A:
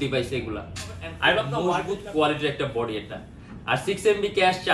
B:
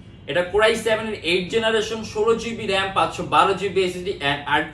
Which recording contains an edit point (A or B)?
A